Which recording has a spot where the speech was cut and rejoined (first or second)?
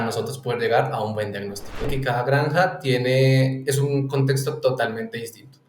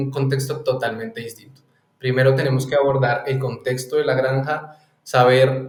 first